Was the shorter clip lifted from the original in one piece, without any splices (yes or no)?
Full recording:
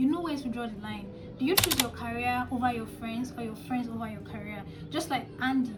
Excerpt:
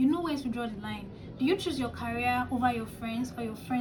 yes